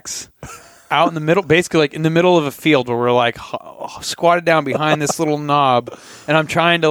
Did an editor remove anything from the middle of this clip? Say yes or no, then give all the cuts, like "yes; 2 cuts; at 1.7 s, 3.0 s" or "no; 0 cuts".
no; 0 cuts